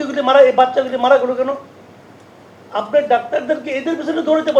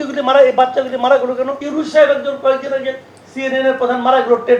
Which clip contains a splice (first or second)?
second